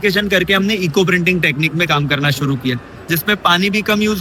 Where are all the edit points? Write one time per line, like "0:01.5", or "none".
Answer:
none